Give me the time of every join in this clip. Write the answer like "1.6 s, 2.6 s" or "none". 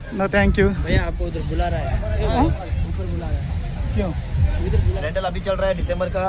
5.0 s